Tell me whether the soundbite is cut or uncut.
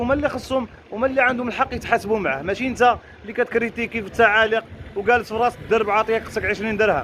uncut